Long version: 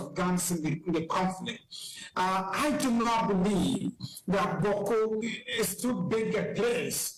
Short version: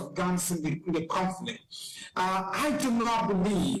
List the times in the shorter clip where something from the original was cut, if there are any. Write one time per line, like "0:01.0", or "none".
none